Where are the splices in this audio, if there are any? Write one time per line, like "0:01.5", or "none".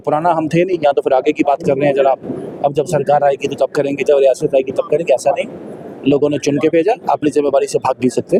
none

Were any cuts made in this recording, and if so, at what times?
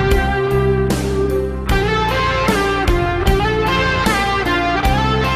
none

